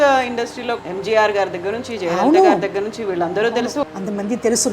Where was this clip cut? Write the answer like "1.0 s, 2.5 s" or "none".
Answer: 0.8 s, 3.8 s